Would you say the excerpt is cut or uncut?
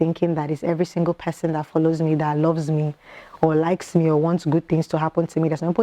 uncut